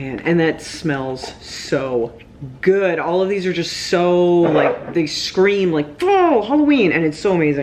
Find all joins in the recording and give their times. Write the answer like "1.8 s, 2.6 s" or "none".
none